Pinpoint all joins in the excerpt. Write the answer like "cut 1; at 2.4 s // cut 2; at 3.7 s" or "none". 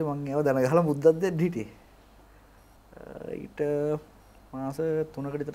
none